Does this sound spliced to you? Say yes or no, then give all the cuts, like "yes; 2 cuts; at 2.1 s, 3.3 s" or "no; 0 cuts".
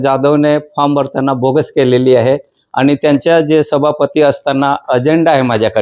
no; 0 cuts